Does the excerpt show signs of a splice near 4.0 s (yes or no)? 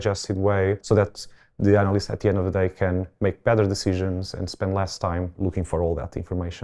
no